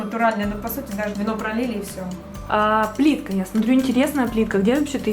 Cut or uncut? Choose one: cut